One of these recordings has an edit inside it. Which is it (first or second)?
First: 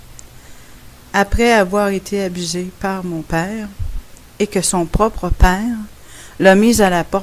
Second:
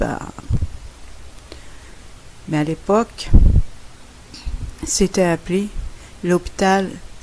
second